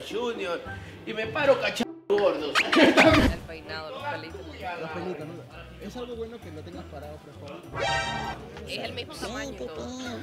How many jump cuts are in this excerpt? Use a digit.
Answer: 1